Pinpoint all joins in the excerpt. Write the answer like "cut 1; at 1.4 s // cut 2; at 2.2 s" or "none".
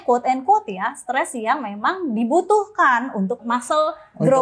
cut 1; at 3.4 s